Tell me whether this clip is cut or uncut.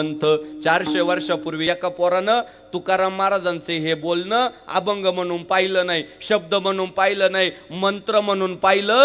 cut